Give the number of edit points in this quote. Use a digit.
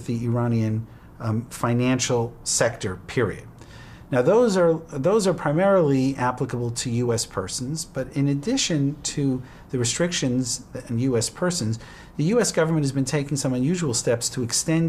0